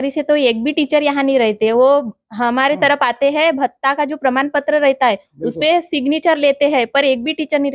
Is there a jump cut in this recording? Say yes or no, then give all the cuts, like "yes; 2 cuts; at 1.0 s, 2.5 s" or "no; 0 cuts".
no; 0 cuts